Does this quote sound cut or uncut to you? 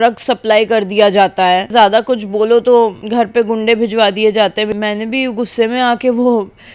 cut